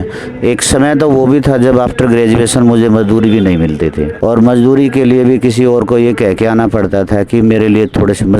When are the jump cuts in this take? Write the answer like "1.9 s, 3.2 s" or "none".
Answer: none